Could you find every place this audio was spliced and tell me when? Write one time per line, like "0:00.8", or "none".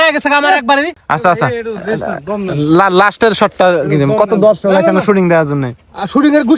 0:01.0